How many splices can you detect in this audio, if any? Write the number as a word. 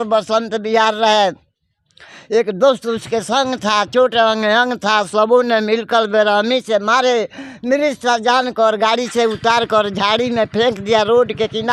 zero